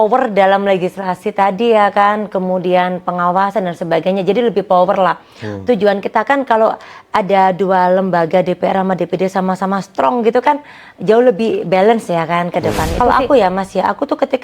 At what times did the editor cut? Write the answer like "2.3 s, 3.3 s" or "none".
12.8 s